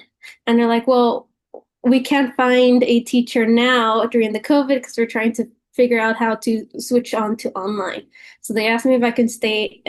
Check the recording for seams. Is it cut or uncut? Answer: uncut